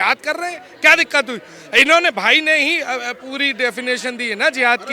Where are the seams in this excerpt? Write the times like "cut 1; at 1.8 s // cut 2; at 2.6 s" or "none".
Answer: none